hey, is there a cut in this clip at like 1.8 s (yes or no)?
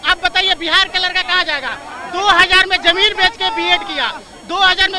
no